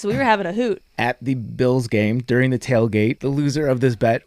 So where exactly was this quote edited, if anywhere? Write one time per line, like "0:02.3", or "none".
0:00.8
0:03.2